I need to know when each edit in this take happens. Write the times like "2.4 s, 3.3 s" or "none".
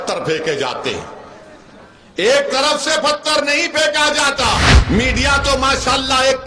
4.7 s